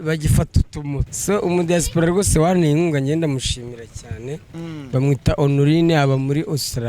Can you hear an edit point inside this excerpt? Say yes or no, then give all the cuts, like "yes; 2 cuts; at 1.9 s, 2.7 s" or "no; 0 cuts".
yes; 1 cut; at 1.1 s